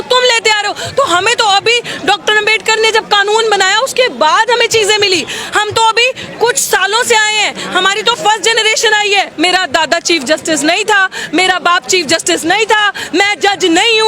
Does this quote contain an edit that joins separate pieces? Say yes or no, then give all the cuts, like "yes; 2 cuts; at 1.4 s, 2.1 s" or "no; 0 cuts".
yes; 1 cut; at 9.3 s